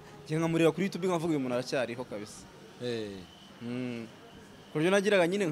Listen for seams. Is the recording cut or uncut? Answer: uncut